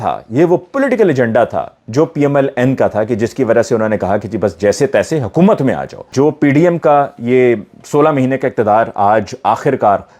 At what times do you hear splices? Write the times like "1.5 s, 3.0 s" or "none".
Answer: 6.1 s